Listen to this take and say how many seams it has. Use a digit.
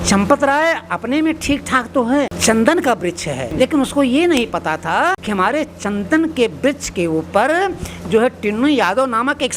3